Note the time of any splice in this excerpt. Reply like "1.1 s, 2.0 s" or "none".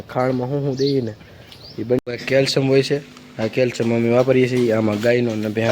2.0 s